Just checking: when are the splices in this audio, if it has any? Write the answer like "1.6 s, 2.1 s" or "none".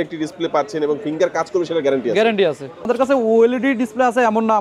2.9 s